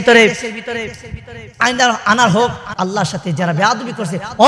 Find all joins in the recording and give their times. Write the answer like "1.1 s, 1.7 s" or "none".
2.6 s